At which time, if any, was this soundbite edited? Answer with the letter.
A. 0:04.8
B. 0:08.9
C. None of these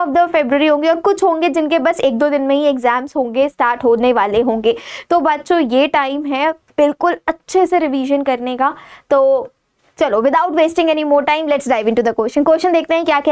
C